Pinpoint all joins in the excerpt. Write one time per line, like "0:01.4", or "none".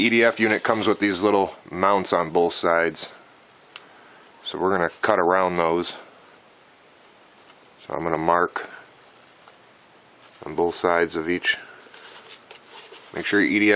none